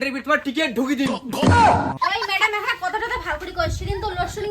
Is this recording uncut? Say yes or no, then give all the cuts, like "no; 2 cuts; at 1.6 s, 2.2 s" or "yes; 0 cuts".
no; 1 cut; at 2.0 s